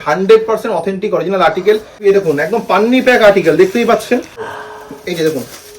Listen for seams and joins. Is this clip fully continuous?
no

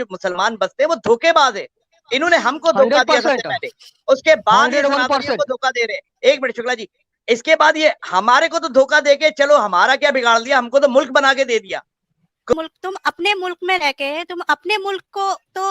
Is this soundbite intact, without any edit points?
no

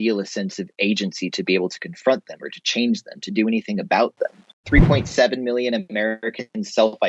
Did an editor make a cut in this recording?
yes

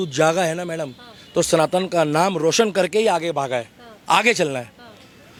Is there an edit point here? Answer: no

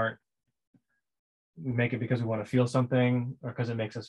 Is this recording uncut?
yes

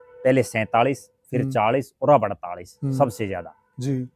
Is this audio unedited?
yes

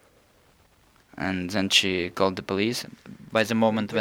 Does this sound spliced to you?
yes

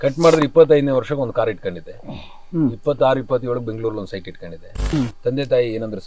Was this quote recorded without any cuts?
no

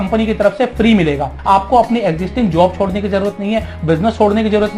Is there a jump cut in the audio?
yes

